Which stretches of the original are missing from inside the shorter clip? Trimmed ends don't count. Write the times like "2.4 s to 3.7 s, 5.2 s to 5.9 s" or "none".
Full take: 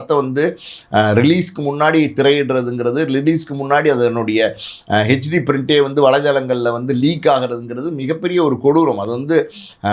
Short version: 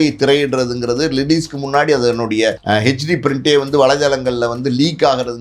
4.6 s to 4.8 s